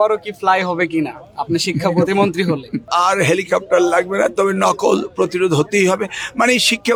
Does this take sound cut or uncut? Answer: uncut